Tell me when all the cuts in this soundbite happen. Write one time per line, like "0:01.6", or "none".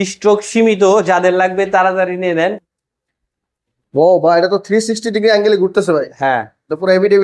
0:02.8